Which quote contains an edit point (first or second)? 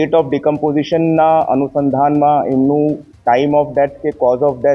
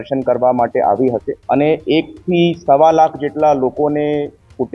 second